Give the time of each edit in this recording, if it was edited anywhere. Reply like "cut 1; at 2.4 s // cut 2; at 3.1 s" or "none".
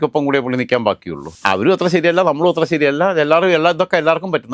cut 1; at 1.3 s